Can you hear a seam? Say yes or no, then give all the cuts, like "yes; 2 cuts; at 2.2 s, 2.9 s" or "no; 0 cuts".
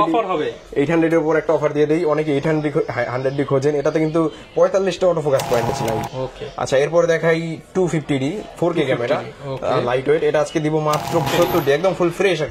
yes; 2 cuts; at 5.7 s, 11.3 s